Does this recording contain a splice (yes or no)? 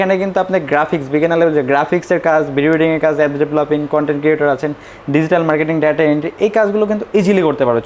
no